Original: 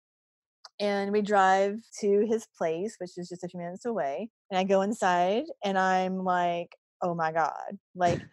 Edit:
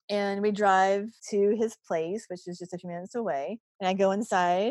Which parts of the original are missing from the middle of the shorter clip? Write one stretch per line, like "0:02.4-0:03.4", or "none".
none